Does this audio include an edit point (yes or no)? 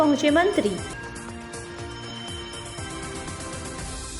no